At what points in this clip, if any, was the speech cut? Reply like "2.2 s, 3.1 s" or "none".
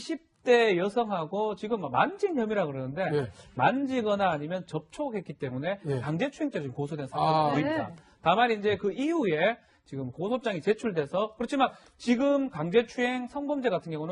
1.5 s